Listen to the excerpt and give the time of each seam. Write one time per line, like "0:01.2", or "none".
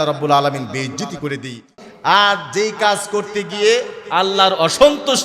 0:01.8